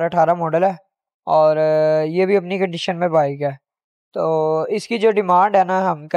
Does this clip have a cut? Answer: no; 0 cuts

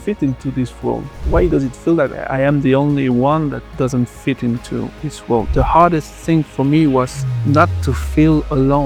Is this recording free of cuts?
no; 2 cuts; at 2.2 s, 5.5 s

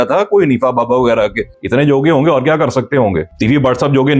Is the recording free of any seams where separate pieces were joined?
no; 2 cuts; at 1.5 s, 3.3 s

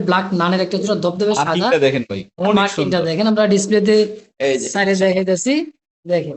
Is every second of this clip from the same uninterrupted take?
yes; 0 cuts

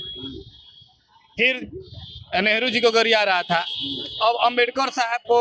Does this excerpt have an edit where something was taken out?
no; 0 cuts

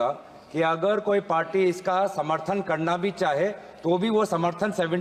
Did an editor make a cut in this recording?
no; 0 cuts

